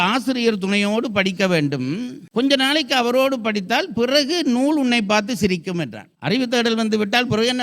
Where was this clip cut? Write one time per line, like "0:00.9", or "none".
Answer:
0:06.0